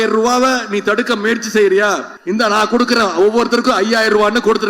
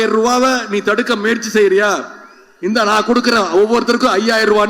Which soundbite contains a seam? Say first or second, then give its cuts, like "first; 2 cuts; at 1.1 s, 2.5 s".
first; 1 cut; at 2.1 s